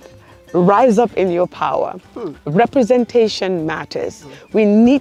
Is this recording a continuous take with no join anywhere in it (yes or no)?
yes